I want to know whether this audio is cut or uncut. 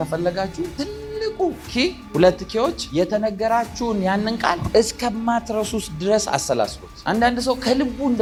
uncut